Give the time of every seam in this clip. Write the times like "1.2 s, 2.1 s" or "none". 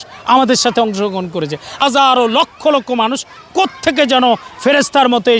1.8 s